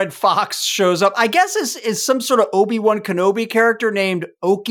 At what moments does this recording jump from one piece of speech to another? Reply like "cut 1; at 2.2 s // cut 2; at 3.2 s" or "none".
none